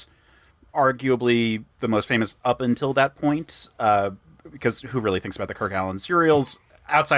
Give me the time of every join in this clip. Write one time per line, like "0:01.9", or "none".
none